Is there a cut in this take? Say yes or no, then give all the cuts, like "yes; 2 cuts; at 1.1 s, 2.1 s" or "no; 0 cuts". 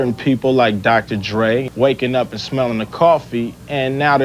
yes; 1 cut; at 1.7 s